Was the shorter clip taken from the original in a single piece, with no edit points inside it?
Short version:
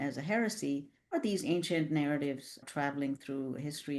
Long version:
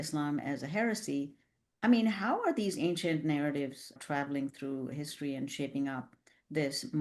no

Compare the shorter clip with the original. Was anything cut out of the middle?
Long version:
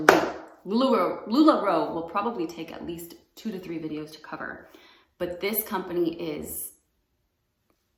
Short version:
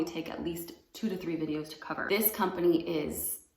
yes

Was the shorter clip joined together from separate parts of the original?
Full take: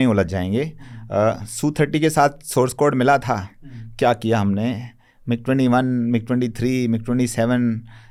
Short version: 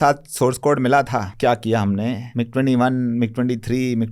yes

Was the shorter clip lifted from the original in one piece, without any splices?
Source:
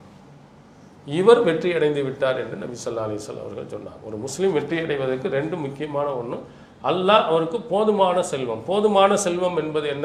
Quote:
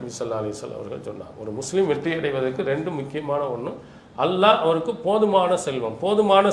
yes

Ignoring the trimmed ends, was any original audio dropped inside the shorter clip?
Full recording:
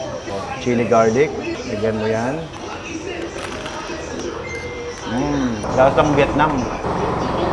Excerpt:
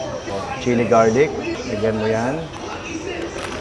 no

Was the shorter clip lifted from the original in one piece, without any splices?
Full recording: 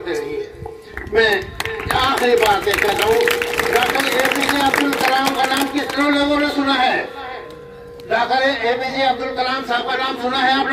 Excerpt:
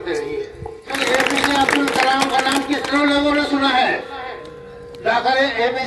no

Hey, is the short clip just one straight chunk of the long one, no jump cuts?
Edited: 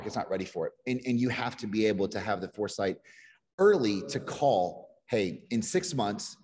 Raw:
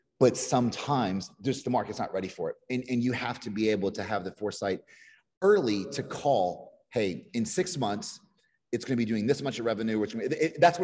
yes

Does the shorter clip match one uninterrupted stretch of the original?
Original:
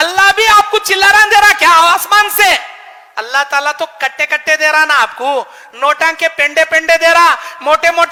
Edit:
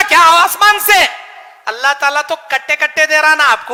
yes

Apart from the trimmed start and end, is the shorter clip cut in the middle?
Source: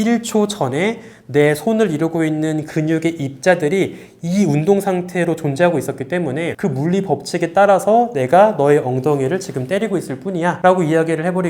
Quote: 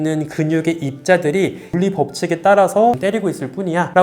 yes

